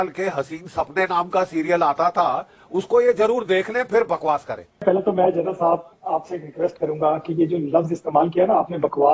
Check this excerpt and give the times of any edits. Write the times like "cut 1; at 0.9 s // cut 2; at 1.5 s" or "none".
cut 1; at 4.8 s